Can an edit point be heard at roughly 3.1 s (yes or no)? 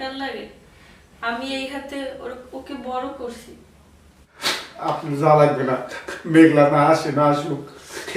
no